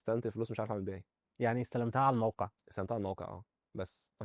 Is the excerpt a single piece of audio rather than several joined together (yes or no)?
yes